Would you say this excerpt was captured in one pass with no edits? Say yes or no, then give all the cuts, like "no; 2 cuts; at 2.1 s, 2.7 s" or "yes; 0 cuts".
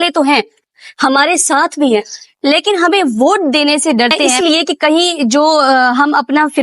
no; 1 cut; at 4.3 s